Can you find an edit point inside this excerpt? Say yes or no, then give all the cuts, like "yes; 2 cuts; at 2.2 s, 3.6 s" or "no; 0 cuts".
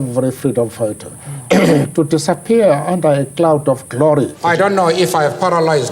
yes; 1 cut; at 4.3 s